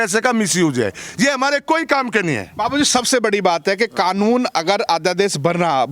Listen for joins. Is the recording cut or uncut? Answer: uncut